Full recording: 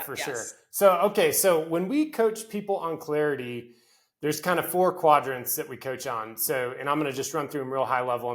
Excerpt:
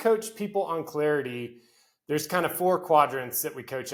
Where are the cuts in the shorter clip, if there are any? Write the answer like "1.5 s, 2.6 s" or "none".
none